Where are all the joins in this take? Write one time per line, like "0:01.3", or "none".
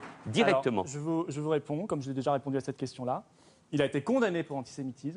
none